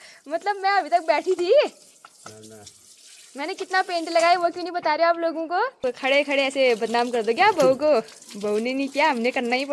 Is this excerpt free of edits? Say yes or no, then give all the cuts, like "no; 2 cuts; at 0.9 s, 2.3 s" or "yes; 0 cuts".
no; 1 cut; at 5.8 s